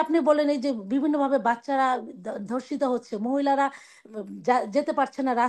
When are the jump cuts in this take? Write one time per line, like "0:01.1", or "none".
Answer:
none